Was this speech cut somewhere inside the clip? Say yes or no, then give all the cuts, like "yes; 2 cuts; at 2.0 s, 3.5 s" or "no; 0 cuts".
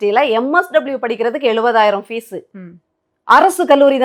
no; 0 cuts